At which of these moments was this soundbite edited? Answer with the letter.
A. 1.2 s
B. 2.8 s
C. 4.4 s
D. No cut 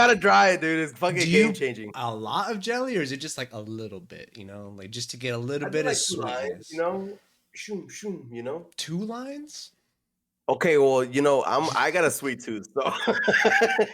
D